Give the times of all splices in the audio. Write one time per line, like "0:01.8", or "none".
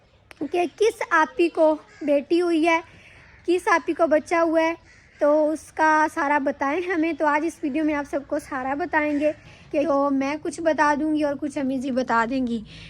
0:09.8